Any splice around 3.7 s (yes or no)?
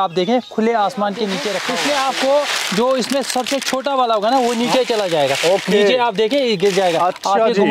no